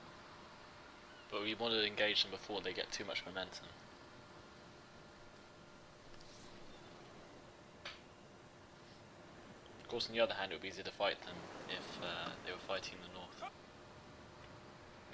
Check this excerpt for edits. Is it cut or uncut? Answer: uncut